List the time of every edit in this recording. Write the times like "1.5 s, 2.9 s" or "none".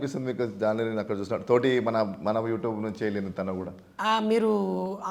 none